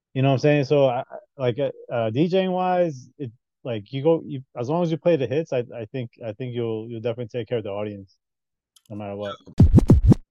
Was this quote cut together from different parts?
yes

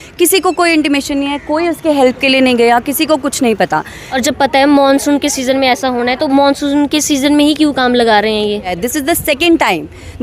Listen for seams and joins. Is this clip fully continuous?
no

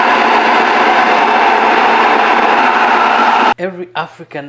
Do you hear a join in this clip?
yes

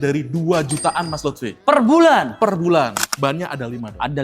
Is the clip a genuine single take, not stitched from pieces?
no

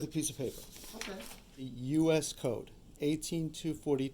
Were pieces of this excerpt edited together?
yes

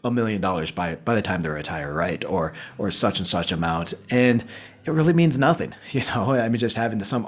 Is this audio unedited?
yes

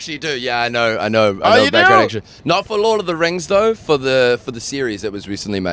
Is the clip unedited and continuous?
yes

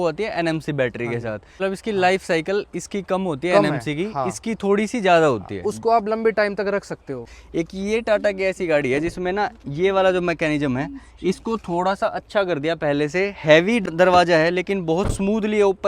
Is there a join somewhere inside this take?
yes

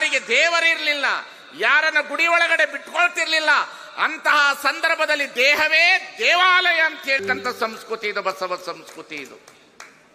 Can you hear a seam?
no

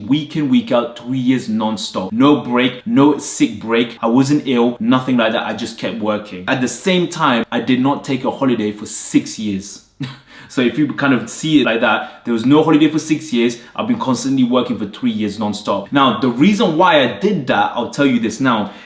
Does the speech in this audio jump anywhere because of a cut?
no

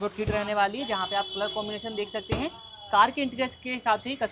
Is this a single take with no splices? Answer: yes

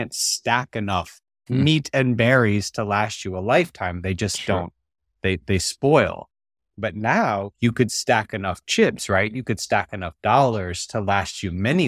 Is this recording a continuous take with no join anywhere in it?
no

